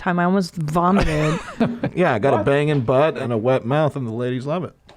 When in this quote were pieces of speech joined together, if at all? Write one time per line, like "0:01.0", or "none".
0:01.9
0:03.2